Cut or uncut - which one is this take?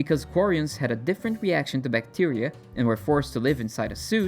uncut